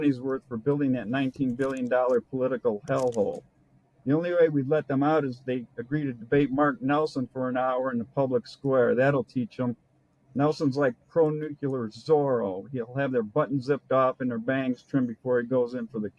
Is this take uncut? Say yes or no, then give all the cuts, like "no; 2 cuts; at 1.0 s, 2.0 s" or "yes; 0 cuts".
yes; 0 cuts